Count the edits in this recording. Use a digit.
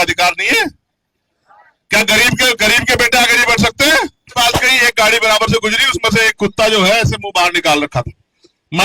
1